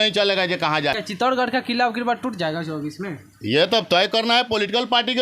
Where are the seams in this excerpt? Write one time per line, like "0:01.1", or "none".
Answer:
0:00.9